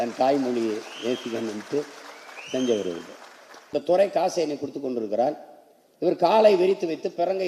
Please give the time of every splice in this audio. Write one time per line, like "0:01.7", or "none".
0:03.7